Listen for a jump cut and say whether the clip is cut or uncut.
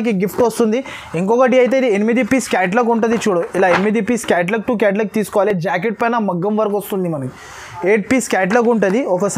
uncut